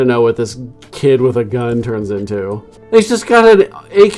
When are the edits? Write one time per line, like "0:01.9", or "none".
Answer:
0:02.7